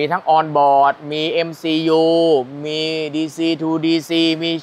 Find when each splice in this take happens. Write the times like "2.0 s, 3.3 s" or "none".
none